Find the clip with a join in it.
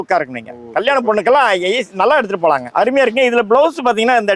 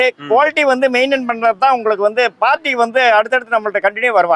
first; 1 cut; at 2.7 s

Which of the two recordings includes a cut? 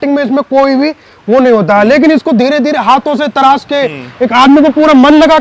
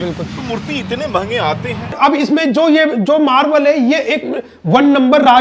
second; 1 cut; at 1.9 s

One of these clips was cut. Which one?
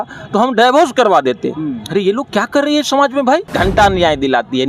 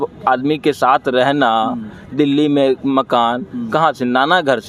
first; 1 cut; at 3.5 s

